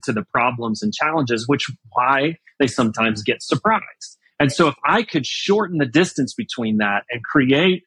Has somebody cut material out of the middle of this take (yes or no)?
no